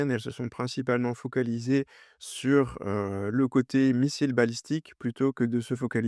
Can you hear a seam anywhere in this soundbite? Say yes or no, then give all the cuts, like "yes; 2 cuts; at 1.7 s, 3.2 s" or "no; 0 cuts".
no; 0 cuts